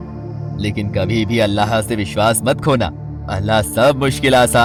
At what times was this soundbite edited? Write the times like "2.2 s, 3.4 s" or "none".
none